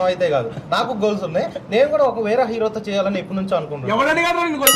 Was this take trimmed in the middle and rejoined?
no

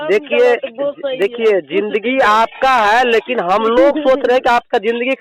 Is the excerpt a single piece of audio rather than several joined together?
yes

